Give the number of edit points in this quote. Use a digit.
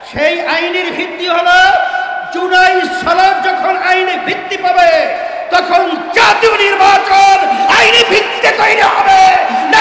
0